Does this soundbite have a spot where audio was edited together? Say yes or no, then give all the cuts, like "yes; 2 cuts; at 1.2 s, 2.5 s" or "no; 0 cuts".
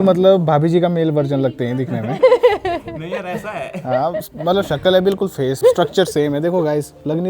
yes; 1 cut; at 5.6 s